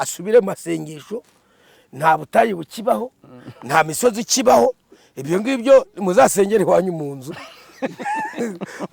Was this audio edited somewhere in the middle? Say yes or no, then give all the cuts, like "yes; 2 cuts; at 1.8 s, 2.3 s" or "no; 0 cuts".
no; 0 cuts